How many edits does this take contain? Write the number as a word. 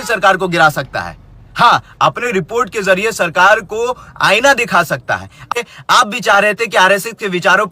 one